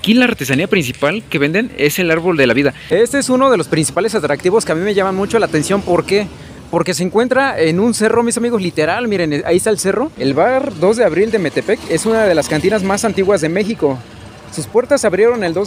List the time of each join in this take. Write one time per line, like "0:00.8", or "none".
0:02.8
0:10.1